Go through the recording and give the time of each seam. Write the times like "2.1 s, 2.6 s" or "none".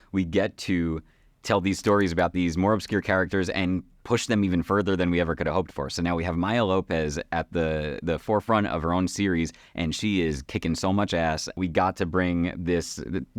11.6 s